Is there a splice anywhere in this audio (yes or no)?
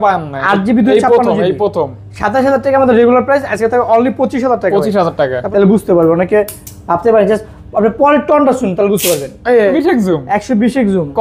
yes